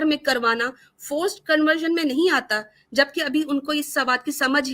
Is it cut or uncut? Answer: uncut